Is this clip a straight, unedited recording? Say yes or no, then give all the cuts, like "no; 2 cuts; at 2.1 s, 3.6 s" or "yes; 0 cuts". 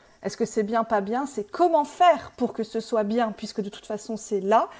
yes; 0 cuts